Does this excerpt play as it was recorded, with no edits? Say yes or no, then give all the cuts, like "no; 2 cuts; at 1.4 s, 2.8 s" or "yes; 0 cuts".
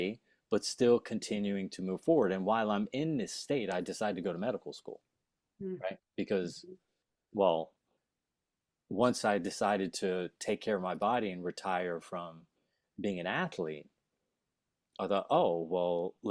yes; 0 cuts